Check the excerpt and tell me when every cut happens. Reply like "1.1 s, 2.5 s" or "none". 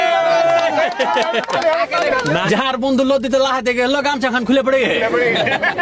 2.4 s